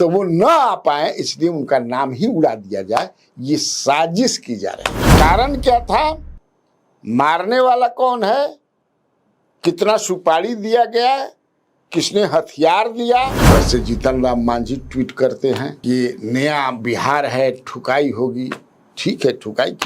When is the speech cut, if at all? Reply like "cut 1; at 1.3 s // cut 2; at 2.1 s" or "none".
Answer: cut 1; at 5.1 s // cut 2; at 13.4 s